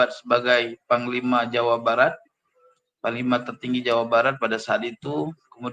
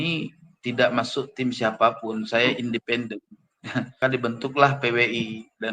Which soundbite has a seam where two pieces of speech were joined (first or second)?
second